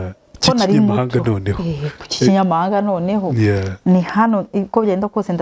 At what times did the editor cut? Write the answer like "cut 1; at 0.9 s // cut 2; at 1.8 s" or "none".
none